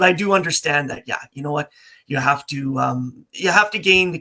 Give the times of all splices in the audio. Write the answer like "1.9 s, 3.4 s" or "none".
none